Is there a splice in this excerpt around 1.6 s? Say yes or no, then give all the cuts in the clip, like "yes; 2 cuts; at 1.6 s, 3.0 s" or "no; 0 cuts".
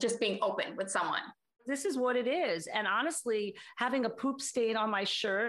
yes; 1 cut; at 1.6 s